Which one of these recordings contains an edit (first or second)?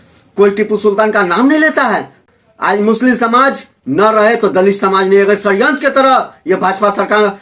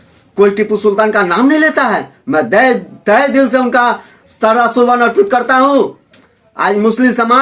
first